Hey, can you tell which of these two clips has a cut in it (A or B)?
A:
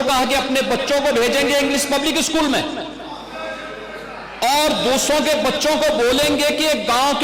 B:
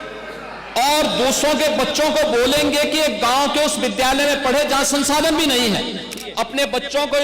B